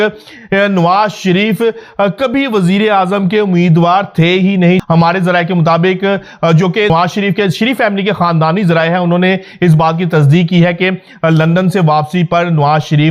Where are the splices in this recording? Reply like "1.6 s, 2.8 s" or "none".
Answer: 4.8 s, 6.9 s